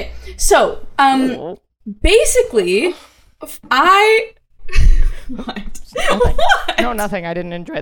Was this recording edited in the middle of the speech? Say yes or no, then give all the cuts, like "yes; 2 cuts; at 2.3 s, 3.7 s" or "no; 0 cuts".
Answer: no; 0 cuts